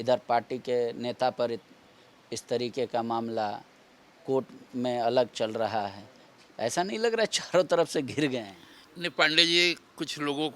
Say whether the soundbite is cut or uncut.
uncut